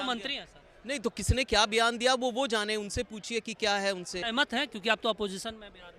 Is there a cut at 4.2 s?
yes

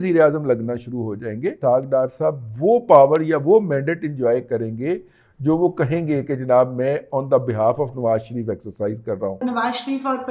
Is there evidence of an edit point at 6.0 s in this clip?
no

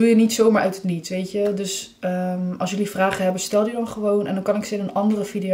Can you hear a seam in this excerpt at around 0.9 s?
no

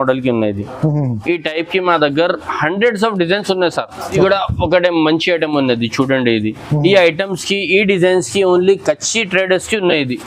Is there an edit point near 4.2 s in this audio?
yes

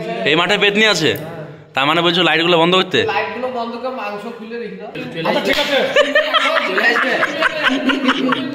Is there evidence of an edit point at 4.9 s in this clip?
yes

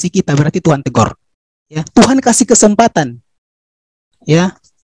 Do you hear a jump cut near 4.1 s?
no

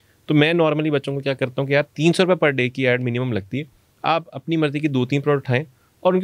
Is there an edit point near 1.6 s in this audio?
no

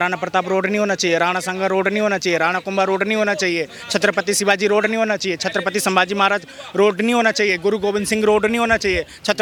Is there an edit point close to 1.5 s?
no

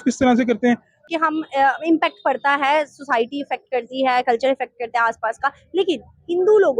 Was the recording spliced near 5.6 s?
no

